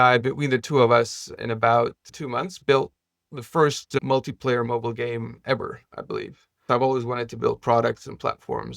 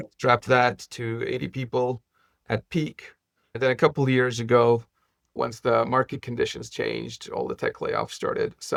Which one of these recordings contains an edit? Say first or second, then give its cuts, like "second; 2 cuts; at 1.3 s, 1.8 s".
first; 1 cut; at 6.6 s